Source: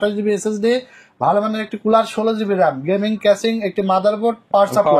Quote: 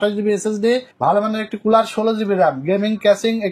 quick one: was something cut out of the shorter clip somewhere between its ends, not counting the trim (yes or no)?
yes